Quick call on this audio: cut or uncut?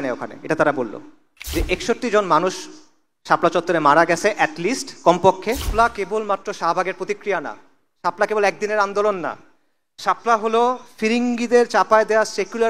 cut